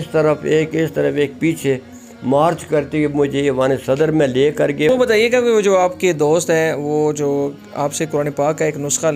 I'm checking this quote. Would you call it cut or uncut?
cut